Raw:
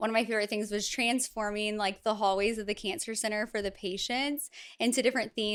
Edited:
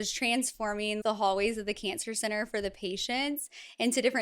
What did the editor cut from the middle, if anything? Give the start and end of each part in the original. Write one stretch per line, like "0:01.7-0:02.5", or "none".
0:01.8-0:02.0

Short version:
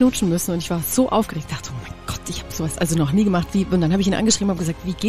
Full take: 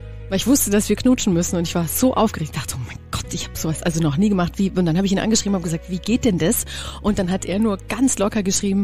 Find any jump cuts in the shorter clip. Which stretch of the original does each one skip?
none

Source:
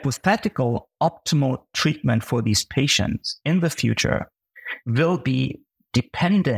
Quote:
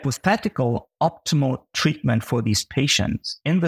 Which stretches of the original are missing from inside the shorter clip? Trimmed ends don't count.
none

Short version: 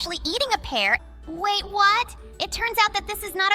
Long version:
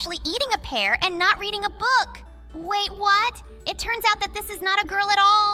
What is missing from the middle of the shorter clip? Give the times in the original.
0:01.0-0:02.2

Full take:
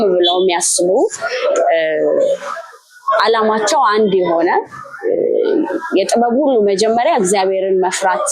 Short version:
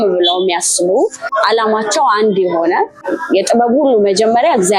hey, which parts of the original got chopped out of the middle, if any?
0:01.2-0:03.0
0:04.9-0:05.8

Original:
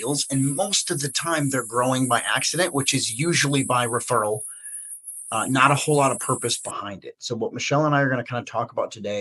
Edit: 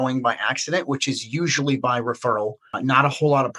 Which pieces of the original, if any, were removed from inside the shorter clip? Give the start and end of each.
0:04.5-0:05.3

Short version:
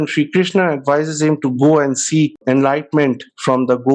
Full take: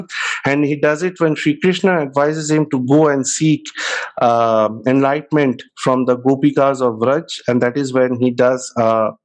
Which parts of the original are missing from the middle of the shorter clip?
0:03.7-0:04.8

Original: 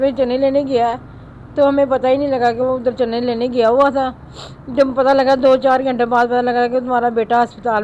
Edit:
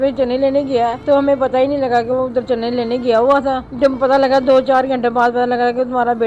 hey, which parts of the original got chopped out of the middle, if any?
0:01.0-0:01.5
0:04.2-0:04.6

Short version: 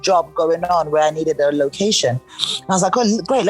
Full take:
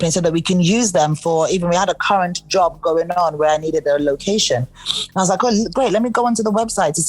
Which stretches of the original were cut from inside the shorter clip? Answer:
none

